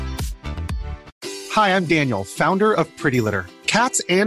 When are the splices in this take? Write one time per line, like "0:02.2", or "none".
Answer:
0:01.1

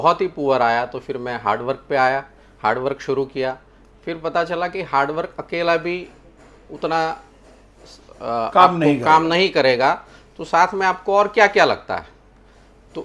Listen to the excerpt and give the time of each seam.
none

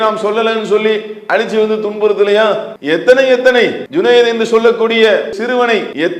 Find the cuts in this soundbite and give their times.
0:02.7
0:03.8
0:05.4

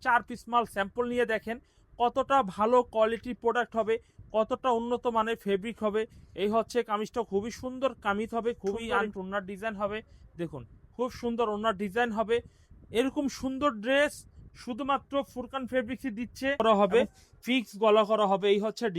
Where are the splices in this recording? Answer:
0:08.9
0:16.6

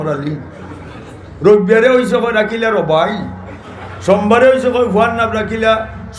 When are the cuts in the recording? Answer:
none

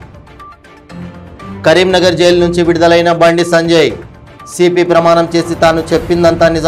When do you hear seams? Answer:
0:01.0

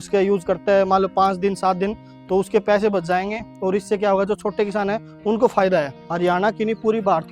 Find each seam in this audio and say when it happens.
0:06.0

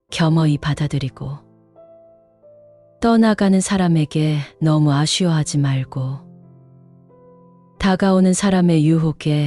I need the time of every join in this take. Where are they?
0:06.2
0:07.8

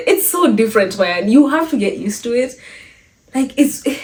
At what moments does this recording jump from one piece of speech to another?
none

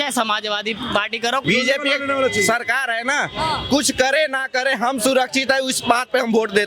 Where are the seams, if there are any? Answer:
0:01.4

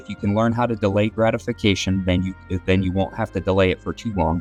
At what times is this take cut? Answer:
none

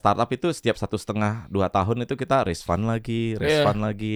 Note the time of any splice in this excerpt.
none

